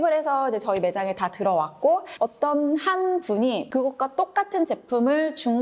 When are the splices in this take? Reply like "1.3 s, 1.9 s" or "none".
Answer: 2.1 s, 3.6 s